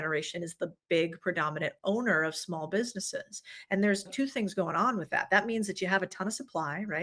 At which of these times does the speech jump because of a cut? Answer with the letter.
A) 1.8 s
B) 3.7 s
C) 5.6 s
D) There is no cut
D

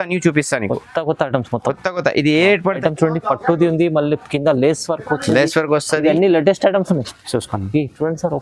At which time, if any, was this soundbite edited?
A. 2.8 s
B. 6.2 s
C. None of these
A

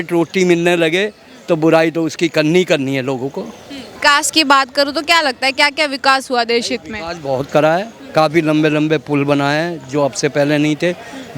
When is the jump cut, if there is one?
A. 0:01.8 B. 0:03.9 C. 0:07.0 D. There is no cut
B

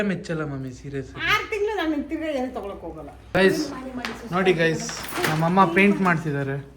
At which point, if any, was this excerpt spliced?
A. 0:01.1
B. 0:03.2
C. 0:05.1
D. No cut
B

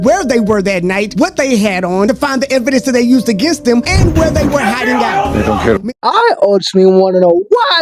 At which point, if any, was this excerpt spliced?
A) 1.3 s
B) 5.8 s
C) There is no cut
B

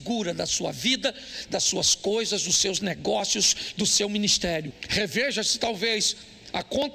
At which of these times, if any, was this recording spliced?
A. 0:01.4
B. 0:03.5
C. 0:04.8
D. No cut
C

